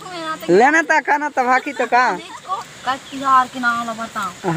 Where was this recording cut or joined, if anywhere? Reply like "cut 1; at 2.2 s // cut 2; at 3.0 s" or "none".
cut 1; at 2.5 s